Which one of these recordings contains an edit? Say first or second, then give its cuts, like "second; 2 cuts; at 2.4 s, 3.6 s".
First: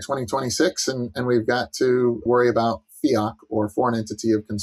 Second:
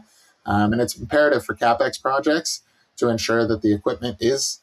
first; 1 cut; at 2.2 s